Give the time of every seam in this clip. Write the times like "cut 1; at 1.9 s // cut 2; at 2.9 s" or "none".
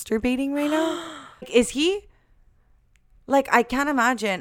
cut 1; at 1.5 s